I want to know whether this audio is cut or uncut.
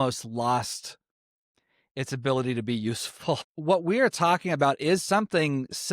cut